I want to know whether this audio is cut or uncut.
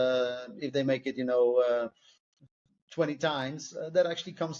uncut